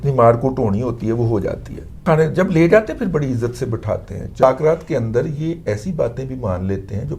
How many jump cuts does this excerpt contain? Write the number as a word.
two